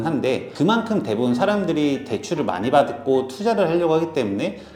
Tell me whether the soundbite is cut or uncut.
uncut